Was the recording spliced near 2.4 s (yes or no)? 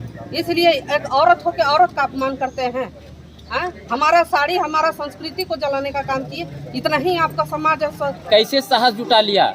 no